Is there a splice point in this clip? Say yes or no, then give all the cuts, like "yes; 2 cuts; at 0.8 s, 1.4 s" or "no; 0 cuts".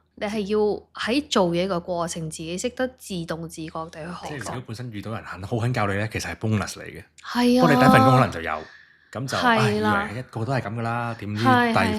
yes; 2 cuts; at 0.9 s, 4.3 s